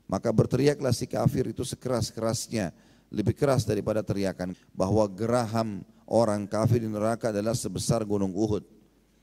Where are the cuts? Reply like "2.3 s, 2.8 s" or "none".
4.5 s